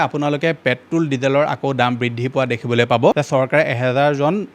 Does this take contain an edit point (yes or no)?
yes